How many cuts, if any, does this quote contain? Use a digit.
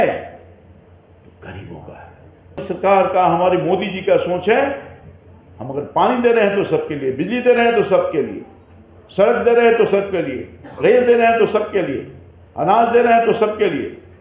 1